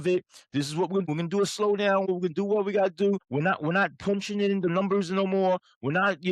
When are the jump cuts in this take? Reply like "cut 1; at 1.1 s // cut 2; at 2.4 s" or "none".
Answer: cut 1; at 1.1 s // cut 2; at 2.1 s // cut 3; at 3.3 s